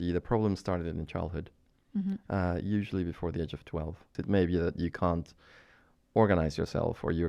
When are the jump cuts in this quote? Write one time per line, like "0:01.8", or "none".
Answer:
0:04.2

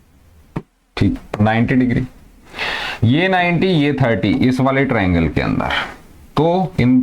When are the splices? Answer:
0:01.2

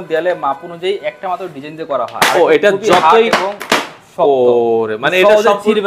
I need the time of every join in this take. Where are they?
none

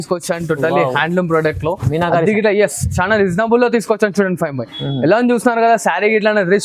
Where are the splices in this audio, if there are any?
none

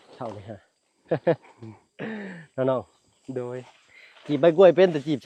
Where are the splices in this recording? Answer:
none

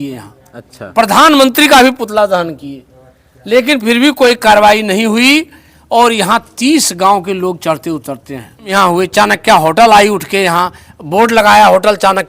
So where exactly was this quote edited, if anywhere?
0:08.7

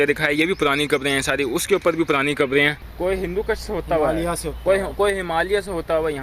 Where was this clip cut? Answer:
0:02.9

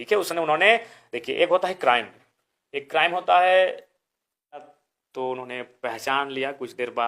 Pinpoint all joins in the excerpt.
0:04.8

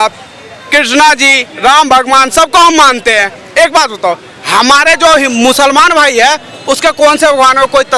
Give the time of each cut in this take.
none

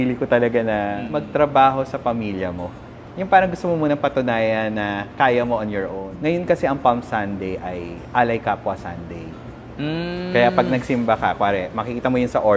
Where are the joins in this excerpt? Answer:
0:01.0
0:06.1

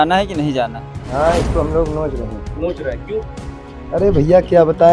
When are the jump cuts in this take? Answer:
0:00.9

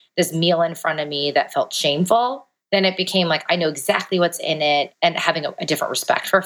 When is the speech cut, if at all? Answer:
0:02.5
0:04.9

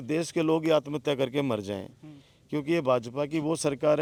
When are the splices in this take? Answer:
none

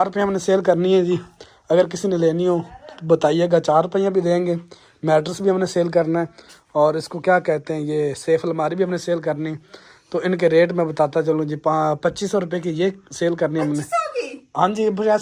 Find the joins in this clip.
none

